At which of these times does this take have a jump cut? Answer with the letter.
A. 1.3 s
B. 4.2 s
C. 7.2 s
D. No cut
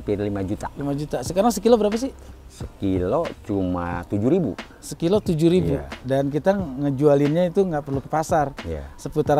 D